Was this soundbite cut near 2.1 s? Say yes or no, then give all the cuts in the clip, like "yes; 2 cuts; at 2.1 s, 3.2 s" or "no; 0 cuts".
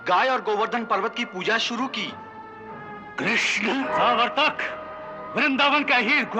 no; 1 cut; at 3.9 s